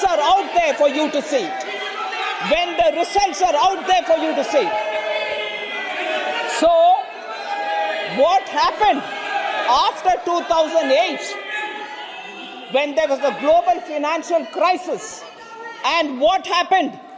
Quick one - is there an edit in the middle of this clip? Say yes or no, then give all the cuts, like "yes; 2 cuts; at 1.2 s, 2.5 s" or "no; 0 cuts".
no; 0 cuts